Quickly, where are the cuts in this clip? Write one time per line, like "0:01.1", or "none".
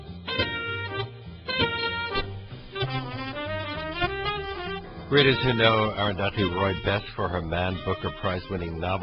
0:04.9